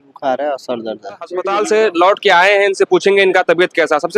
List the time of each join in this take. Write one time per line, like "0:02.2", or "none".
0:01.5